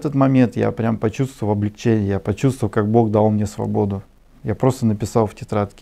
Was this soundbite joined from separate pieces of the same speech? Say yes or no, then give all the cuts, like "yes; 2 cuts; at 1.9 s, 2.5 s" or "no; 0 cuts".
no; 0 cuts